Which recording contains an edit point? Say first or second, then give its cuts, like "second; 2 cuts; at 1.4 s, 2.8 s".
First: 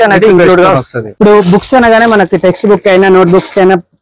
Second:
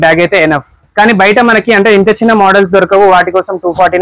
first; 1 cut; at 1.0 s